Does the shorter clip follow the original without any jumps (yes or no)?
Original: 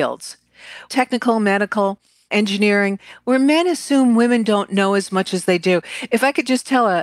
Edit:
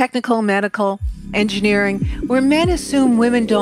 yes